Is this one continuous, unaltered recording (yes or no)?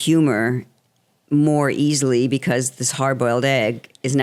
yes